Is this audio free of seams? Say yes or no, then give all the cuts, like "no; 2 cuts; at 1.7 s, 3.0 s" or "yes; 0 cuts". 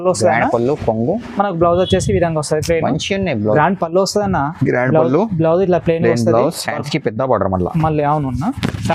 no; 1 cut; at 3.5 s